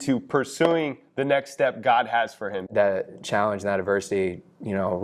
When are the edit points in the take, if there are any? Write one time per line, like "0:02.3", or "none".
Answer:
0:02.7